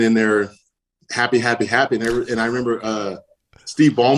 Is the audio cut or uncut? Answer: uncut